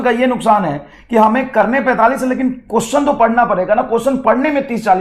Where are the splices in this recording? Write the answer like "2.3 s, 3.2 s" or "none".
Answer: none